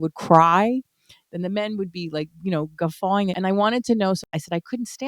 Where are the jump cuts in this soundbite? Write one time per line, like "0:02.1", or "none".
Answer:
0:03.4
0:04.2

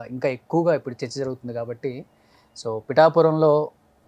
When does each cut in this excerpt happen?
none

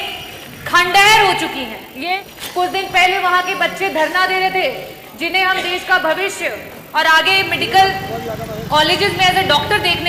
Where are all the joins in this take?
0:02.2

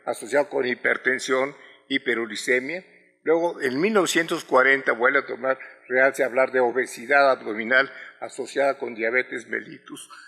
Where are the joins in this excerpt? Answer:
0:05.1

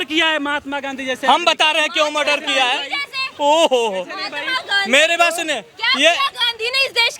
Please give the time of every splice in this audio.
none

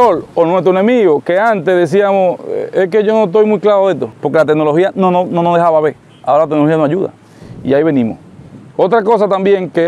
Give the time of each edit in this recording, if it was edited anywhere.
none

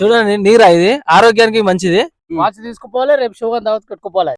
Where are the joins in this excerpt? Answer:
0:02.2

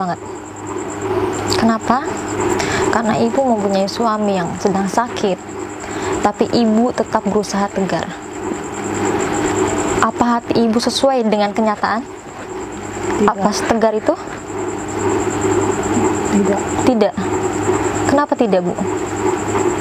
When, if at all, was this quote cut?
none

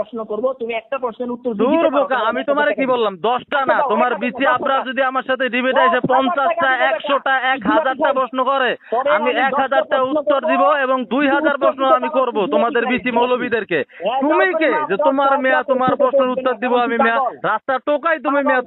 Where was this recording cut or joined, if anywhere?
none

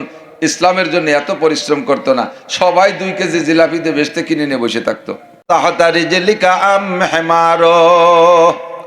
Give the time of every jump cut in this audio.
0:05.4

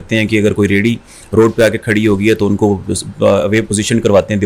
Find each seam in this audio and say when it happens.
none

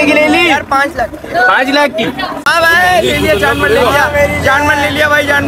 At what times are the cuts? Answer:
0:02.5

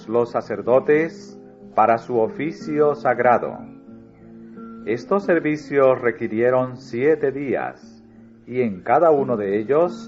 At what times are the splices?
0:09.0

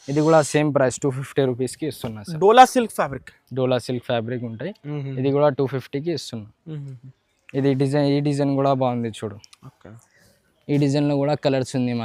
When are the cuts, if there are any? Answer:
none

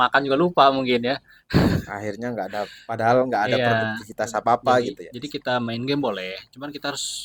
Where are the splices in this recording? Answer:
none

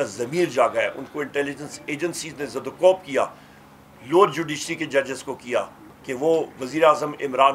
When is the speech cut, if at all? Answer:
0:05.8

